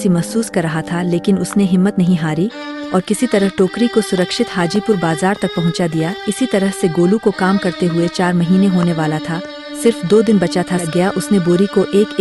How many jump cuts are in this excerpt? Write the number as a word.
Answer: one